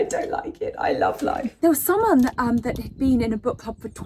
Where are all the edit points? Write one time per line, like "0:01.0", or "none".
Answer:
0:01.6